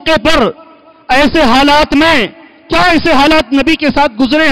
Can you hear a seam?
no; 0 cuts

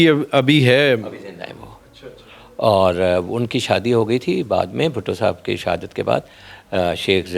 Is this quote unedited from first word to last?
yes; 0 cuts

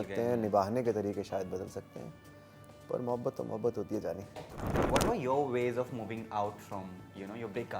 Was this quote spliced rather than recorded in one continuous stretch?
yes; 1 cut; at 4.8 s

